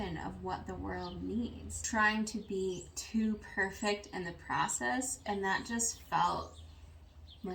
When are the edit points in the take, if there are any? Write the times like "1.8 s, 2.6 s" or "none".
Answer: 1.8 s